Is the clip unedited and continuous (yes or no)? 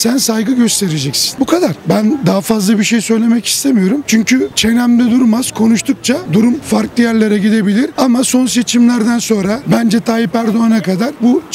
yes